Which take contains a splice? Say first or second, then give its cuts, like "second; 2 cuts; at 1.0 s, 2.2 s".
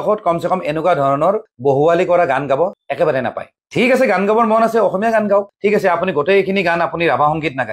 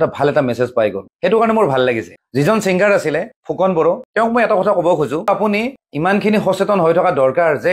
second; 2 cuts; at 4.1 s, 5.3 s